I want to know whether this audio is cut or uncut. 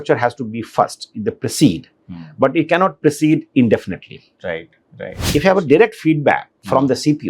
cut